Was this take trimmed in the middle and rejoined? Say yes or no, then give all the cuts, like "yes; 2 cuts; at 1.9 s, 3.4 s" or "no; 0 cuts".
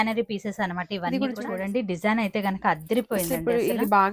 yes; 1 cut; at 1.4 s